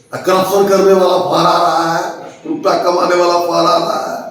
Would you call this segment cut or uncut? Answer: uncut